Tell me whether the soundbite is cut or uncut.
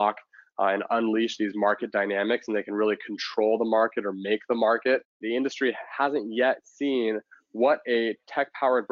cut